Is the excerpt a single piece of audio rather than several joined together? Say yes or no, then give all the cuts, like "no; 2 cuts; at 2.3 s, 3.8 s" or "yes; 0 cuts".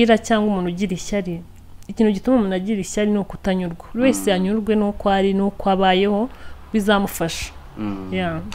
yes; 0 cuts